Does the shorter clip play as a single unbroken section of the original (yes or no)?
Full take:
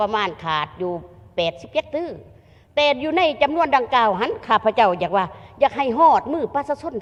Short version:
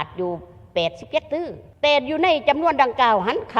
no